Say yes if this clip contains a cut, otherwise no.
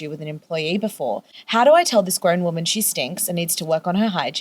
yes